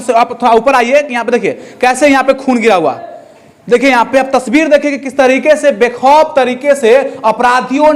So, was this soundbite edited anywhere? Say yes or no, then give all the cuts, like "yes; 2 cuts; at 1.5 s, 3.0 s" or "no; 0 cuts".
no; 0 cuts